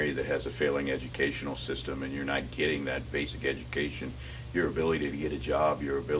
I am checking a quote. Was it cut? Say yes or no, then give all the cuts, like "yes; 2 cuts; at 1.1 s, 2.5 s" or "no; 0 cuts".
no; 0 cuts